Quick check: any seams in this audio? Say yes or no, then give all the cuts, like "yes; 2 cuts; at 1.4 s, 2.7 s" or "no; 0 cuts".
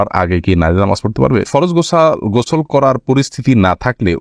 yes; 1 cut; at 1.5 s